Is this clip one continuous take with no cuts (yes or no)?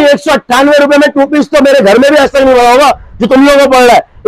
yes